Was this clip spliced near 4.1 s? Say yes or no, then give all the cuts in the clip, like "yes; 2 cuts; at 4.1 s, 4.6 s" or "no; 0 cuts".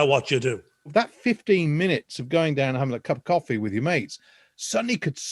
no; 1 cut; at 0.9 s